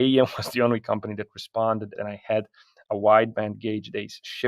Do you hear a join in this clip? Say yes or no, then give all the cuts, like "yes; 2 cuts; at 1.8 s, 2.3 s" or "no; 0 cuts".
yes; 1 cut; at 1.9 s